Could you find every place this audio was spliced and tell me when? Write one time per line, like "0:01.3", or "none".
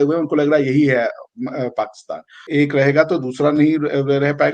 0:02.5